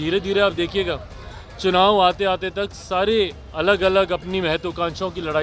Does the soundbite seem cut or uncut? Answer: uncut